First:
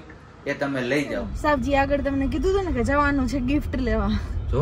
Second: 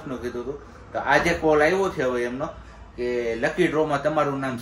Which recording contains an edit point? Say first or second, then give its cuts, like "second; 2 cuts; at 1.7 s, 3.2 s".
first; 1 cut; at 1.3 s